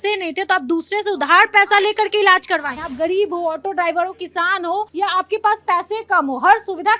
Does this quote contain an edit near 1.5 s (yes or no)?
no